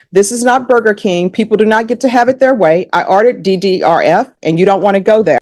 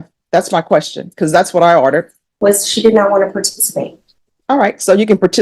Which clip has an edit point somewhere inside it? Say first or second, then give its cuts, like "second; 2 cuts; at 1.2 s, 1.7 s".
second; 1 cut; at 2.2 s